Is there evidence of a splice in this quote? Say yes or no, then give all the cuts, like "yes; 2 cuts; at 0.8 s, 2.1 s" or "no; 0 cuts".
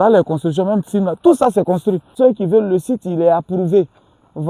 yes; 1 cut; at 2.1 s